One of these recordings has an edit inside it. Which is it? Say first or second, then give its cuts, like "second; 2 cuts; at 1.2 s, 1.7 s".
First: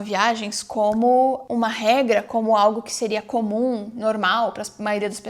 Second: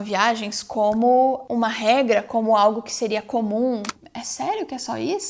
second; 1 cut; at 3.9 s